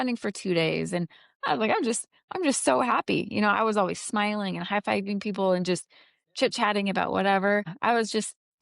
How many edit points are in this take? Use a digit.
1